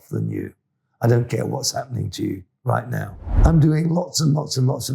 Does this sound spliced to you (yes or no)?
yes